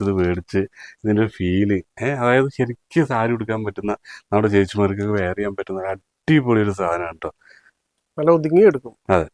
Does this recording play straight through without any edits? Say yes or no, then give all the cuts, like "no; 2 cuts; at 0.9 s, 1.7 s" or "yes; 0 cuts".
yes; 0 cuts